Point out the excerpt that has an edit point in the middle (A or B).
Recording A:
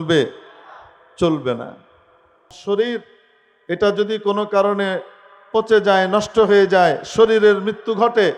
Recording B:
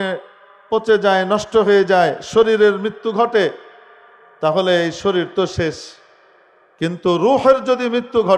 A